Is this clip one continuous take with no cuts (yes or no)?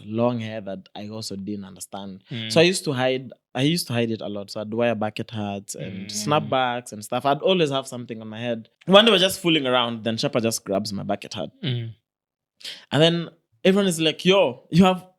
no